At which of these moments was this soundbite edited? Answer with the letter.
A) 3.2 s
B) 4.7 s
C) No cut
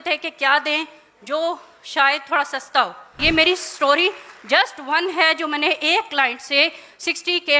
A